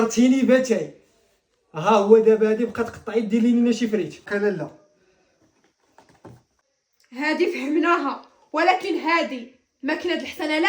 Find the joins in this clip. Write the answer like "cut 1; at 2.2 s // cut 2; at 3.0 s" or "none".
none